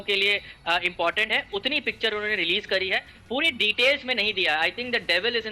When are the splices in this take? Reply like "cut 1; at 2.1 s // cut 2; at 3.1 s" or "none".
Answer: none